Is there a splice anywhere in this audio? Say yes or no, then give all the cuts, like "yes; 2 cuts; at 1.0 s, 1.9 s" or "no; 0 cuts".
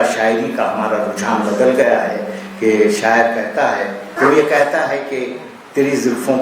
yes; 1 cut; at 4.0 s